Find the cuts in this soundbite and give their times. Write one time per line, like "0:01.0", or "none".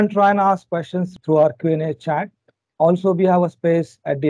0:01.1